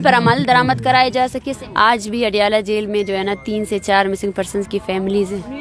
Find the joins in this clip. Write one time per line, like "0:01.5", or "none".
0:01.5